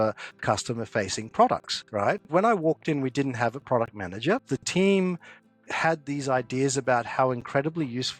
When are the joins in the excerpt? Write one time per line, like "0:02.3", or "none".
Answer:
0:02.3
0:04.5